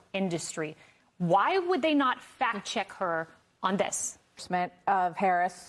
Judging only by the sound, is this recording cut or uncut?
cut